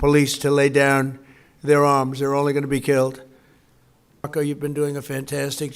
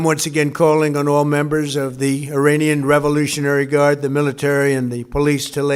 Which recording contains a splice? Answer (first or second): first